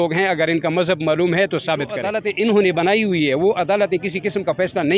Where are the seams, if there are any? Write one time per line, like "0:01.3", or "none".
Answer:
0:02.0